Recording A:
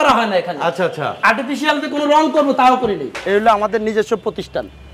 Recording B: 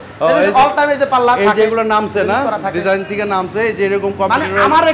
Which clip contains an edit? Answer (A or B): A